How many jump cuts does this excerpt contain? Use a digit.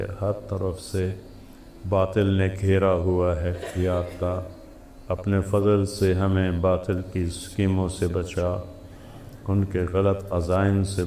0